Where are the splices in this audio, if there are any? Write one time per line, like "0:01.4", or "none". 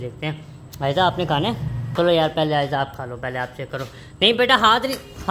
0:01.8